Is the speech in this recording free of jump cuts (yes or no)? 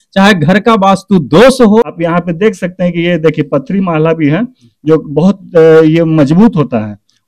no